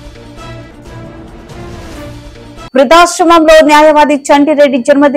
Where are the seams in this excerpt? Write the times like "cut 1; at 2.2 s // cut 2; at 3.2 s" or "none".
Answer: cut 1; at 1.6 s